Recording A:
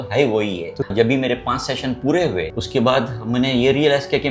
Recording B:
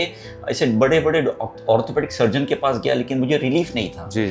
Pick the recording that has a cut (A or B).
A